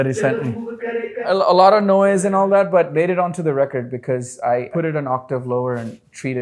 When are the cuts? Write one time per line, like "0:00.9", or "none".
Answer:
0:01.2
0:02.9
0:04.7